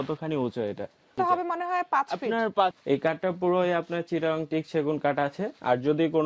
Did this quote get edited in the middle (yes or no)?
yes